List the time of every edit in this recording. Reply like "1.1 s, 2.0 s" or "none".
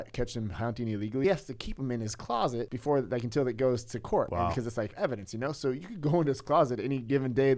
1.2 s, 2.7 s, 4.6 s